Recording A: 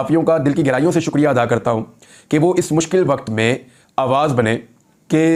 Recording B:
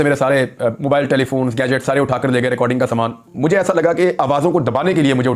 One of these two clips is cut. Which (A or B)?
B